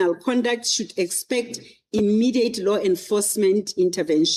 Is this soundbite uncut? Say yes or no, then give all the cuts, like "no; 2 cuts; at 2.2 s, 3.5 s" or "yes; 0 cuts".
yes; 0 cuts